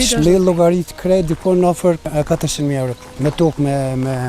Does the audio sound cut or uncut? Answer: cut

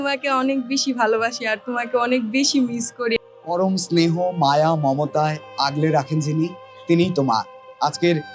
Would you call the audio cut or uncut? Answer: uncut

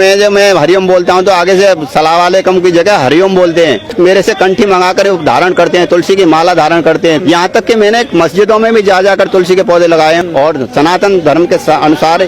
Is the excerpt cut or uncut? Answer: cut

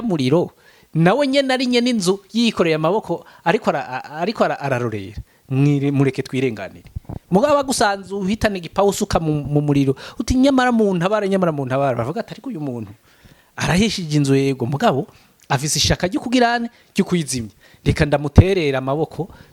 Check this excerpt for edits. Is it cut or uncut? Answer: uncut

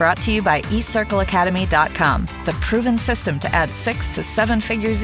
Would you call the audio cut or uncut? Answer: uncut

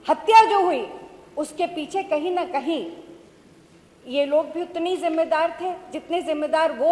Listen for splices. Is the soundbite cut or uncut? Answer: uncut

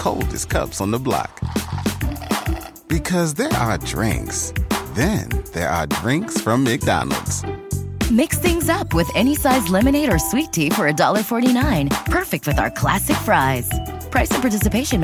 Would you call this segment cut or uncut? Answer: uncut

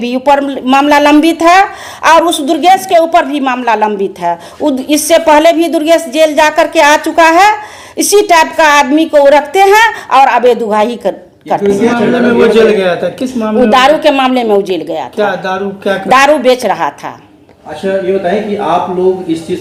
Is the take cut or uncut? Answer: uncut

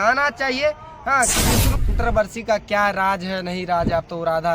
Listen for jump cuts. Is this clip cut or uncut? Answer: cut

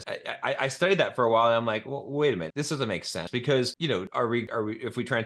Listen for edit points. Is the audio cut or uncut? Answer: uncut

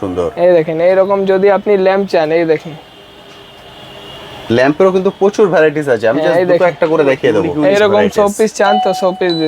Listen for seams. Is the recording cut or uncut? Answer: cut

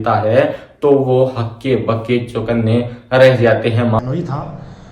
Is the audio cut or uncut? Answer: cut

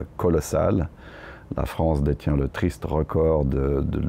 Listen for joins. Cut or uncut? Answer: uncut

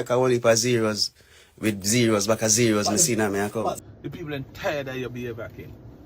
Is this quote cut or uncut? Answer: cut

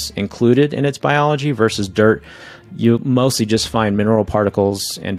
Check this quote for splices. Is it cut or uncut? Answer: uncut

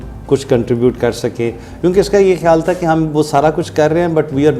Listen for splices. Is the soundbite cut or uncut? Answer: uncut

